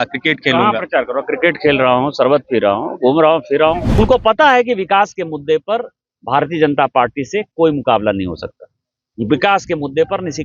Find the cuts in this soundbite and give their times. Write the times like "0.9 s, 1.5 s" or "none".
3.9 s